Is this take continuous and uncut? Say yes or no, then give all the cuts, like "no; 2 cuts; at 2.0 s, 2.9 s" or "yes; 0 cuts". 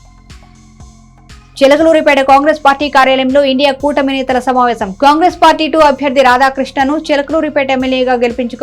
no; 1 cut; at 1.5 s